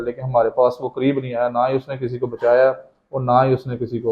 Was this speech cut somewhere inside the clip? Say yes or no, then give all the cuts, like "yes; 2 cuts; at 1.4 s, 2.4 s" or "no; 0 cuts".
no; 0 cuts